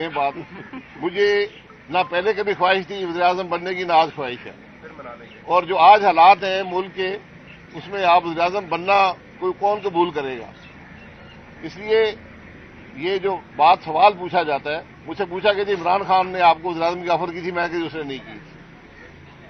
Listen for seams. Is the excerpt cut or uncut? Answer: uncut